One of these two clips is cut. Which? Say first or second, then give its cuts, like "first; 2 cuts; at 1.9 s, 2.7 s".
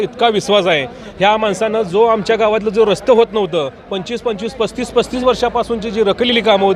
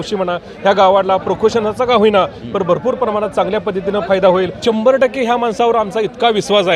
second; 1 cut; at 4.6 s